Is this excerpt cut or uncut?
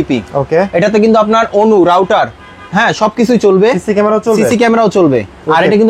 uncut